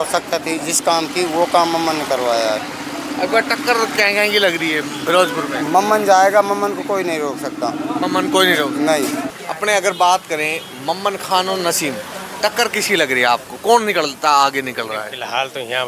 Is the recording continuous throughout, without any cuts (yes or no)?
yes